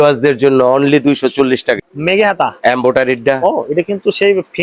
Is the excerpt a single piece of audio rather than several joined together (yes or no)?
no